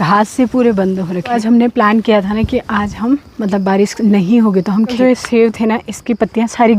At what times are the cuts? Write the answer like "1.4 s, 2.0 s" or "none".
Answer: 1.3 s, 4.9 s

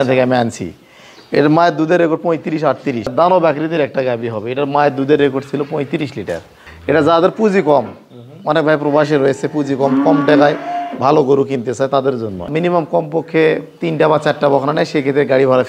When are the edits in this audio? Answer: 3.1 s, 6.7 s, 12.5 s

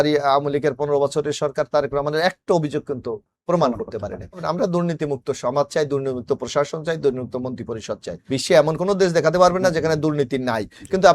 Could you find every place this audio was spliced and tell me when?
4.4 s, 8.1 s

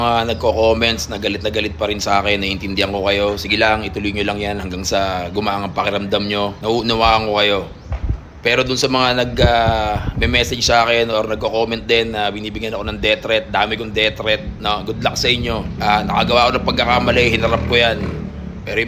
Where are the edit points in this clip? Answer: 6.6 s, 15.7 s

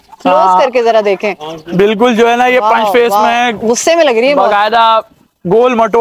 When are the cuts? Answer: none

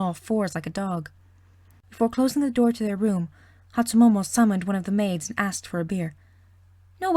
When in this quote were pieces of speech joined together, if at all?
5.3 s

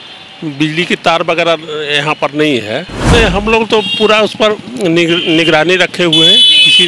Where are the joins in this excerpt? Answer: 2.9 s

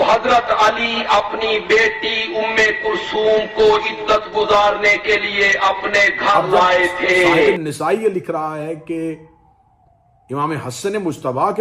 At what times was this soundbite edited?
7.5 s

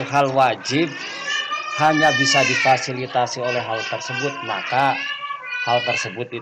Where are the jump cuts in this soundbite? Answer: none

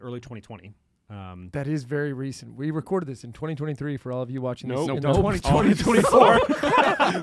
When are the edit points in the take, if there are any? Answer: none

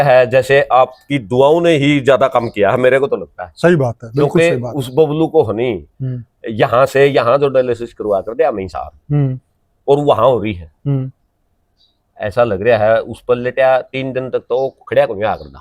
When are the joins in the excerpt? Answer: none

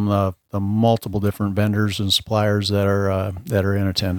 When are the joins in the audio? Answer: none

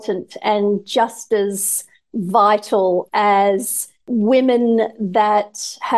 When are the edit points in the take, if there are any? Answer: 4.1 s

